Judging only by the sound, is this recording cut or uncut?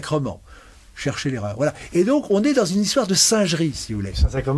uncut